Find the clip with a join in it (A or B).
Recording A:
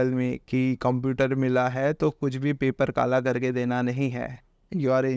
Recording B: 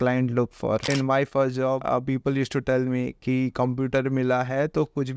B